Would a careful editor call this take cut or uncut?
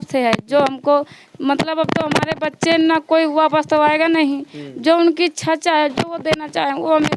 uncut